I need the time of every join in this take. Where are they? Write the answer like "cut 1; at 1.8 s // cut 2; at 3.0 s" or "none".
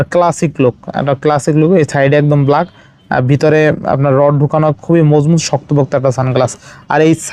none